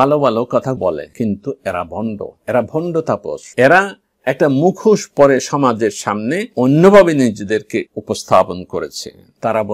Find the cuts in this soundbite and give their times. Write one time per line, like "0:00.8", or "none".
0:07.9